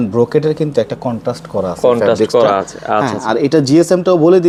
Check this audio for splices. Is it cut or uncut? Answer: uncut